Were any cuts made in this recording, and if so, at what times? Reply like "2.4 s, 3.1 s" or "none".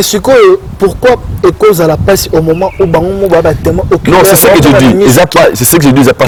none